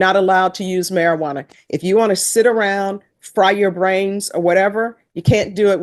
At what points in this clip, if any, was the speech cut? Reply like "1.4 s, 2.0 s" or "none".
none